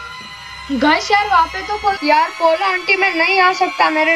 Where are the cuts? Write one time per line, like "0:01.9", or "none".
0:02.0